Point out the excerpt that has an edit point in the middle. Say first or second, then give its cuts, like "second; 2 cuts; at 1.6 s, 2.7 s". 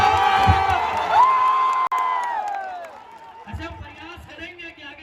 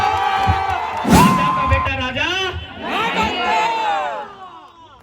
second; 1 cut; at 1.9 s